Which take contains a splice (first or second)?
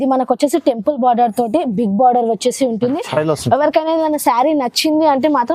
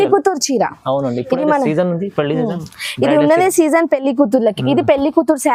first